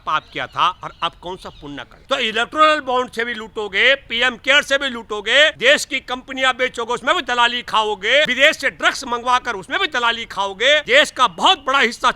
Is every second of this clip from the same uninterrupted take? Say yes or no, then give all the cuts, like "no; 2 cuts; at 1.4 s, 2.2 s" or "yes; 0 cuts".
no; 4 cuts; at 1.9 s, 5.6 s, 8.3 s, 10.8 s